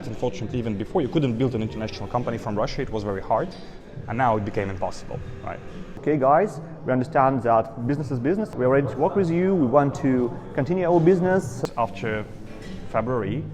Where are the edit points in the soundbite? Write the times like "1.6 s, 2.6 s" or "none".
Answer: 5.9 s, 11.5 s